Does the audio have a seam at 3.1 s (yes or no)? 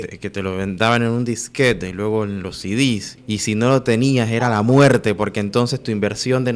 yes